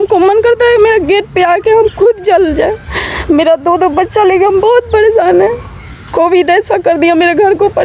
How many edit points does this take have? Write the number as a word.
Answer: zero